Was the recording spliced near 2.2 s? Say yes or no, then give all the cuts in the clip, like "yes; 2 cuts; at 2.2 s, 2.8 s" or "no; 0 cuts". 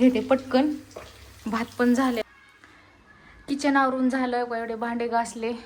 yes; 1 cut; at 2.2 s